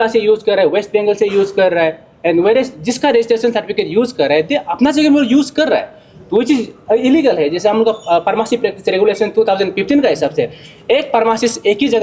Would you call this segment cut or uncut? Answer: uncut